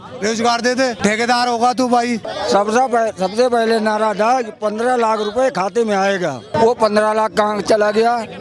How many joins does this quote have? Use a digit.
3